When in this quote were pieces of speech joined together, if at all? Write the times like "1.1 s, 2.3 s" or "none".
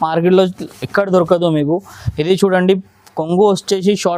none